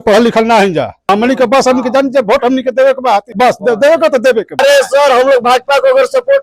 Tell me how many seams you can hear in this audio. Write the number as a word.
three